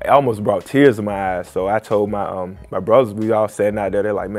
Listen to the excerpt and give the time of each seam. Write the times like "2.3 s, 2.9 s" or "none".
none